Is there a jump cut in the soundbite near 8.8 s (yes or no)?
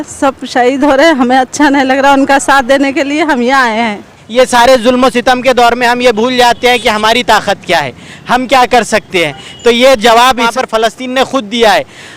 no